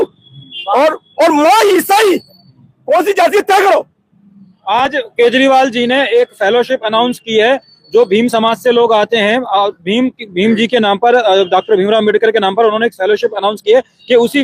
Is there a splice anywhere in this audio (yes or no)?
no